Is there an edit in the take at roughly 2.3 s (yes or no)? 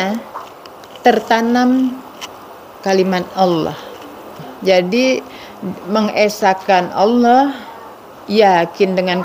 no